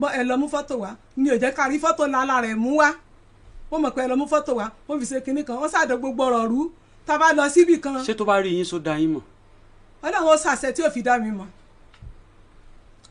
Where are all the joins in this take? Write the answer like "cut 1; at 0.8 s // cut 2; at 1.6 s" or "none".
none